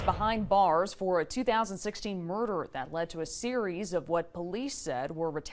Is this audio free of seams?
yes; 0 cuts

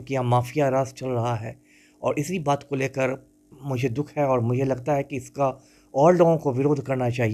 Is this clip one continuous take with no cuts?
yes; 0 cuts

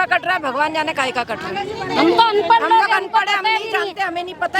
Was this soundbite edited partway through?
no; 0 cuts

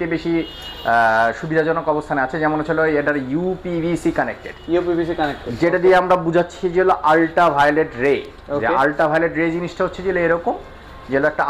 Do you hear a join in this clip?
no; 0 cuts

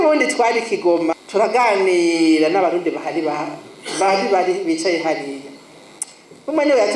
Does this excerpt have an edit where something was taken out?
yes; 1 cut; at 1.2 s

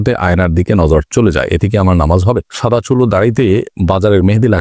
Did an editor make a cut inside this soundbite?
yes; 2 cuts; at 2.5 s, 3.7 s

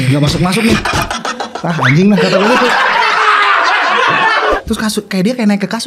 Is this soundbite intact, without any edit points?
no; 1 cut; at 4.6 s

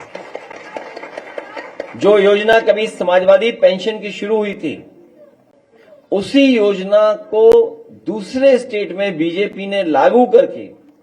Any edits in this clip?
no; 0 cuts

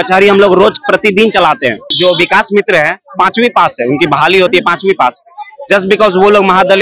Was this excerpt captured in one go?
no; 1 cut; at 1.9 s

